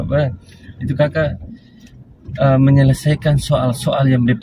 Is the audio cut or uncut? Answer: uncut